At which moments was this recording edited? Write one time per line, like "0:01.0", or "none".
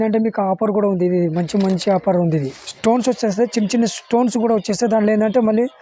0:02.6